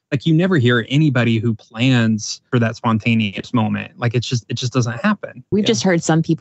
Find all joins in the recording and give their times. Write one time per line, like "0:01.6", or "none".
0:02.5
0:05.5